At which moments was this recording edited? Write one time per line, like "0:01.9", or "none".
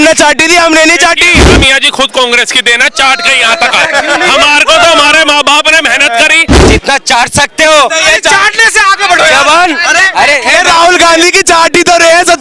0:01.5
0:06.4